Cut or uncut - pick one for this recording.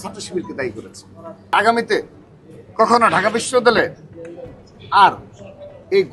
cut